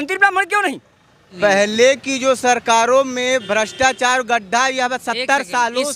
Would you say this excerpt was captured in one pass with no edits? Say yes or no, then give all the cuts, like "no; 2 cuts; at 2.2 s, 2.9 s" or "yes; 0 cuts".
no; 1 cut; at 1.3 s